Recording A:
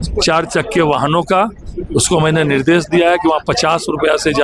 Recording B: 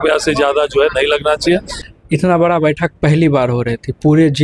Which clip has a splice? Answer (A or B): B